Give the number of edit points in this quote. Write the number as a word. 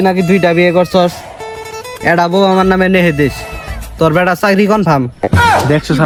zero